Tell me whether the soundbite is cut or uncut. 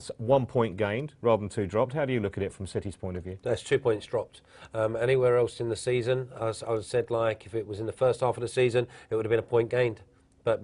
cut